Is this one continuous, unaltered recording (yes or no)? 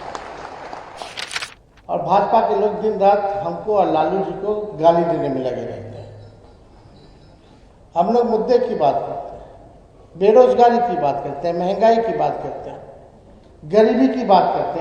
no